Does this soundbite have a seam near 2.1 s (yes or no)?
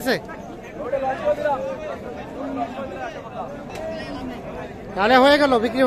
no